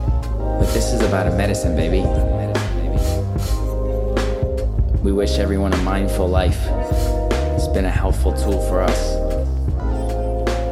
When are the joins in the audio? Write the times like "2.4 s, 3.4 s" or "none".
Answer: none